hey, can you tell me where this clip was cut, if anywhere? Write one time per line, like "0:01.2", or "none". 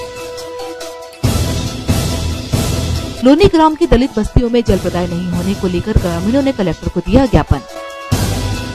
0:01.0

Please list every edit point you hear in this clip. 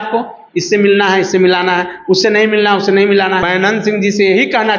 0:03.5

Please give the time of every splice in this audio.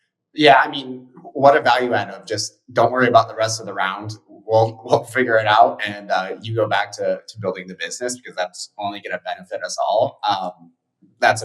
none

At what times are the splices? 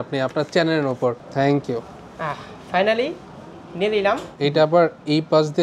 0:01.2
0:04.3

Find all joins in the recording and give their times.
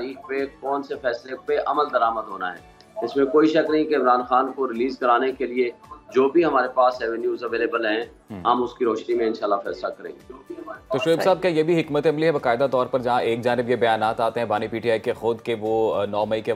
none

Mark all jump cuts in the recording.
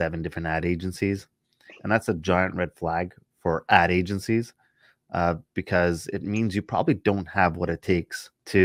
none

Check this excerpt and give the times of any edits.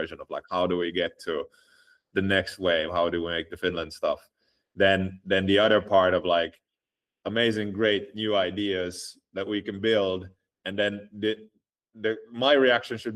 none

